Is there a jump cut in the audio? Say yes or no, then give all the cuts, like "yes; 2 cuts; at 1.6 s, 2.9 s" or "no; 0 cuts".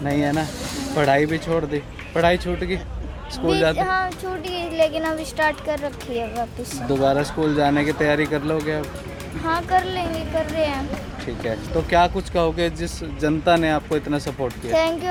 no; 0 cuts